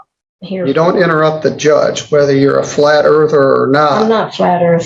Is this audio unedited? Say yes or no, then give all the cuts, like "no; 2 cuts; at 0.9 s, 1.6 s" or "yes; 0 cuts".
yes; 0 cuts